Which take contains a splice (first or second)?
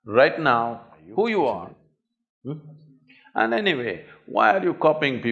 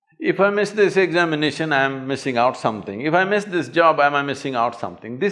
first